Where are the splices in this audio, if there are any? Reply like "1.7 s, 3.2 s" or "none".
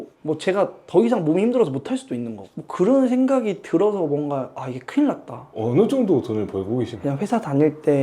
5.6 s, 6.9 s